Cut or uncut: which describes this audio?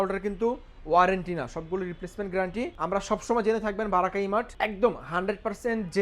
cut